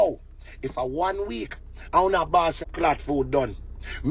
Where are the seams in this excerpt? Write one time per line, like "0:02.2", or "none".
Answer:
0:02.7